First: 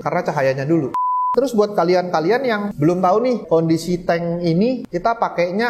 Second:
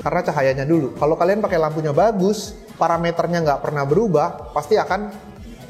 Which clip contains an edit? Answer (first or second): first